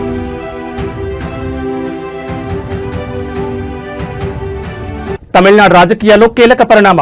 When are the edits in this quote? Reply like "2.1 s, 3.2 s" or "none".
4.8 s

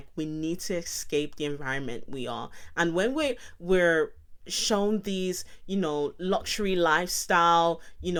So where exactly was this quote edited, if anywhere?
none

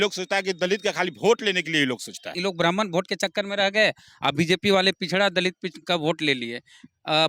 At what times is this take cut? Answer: 2.3 s

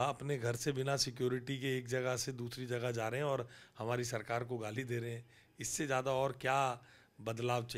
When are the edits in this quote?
none

